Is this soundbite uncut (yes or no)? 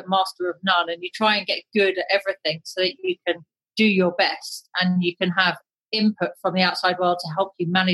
yes